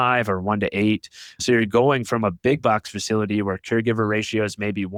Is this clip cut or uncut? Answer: uncut